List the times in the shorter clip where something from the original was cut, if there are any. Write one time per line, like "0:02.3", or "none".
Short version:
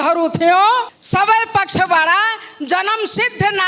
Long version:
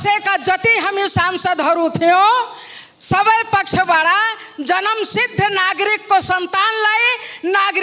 0:00.9